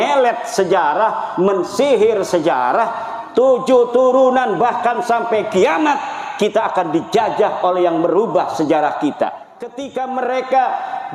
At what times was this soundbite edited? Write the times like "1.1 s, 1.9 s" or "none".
9.8 s